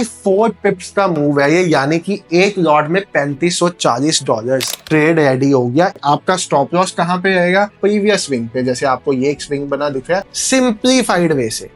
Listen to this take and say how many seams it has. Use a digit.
4